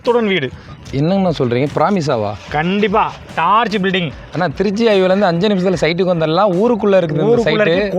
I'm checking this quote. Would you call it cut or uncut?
uncut